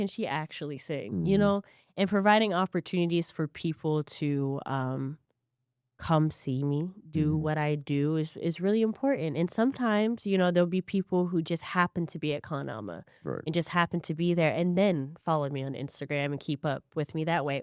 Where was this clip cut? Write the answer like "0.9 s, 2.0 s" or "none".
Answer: none